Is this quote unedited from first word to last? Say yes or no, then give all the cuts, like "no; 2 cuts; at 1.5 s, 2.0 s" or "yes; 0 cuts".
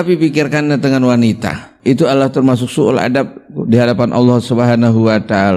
no; 1 cut; at 1.7 s